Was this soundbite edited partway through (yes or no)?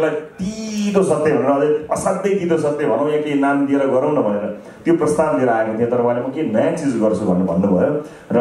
no